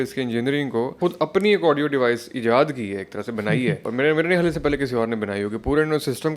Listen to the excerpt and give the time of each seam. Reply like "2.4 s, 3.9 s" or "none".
1.0 s, 3.8 s